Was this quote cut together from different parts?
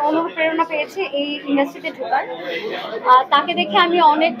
no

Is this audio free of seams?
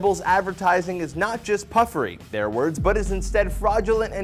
yes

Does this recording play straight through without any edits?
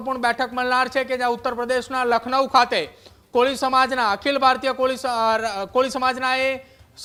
yes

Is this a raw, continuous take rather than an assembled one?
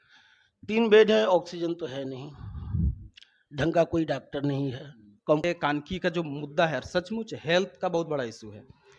no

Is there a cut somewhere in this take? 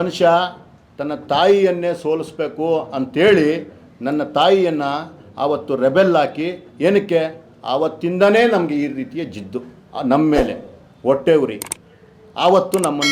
no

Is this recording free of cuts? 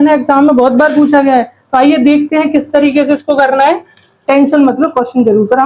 no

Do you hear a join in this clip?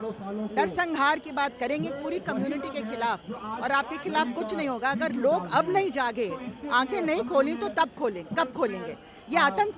no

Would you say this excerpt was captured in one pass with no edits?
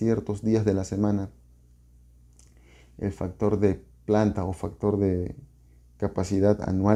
yes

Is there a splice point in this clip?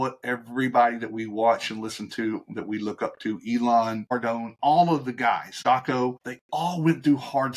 yes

